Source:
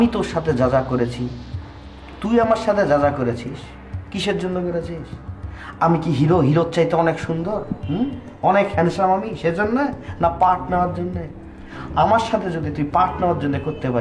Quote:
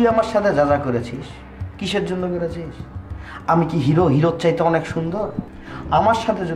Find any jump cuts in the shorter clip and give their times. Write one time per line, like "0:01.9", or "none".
0:05.4